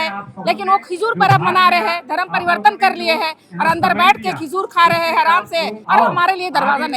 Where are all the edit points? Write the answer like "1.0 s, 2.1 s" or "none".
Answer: 5.8 s